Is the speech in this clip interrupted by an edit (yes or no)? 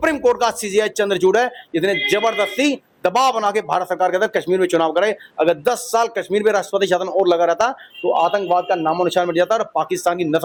no